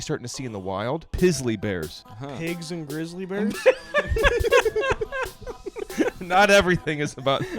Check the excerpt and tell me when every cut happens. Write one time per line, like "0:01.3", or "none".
0:01.1
0:02.1